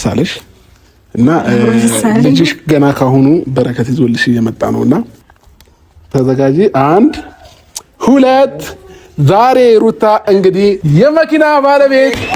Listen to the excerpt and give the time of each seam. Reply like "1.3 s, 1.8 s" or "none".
5.2 s